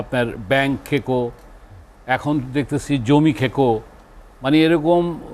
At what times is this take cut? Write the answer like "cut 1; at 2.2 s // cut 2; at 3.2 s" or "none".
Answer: none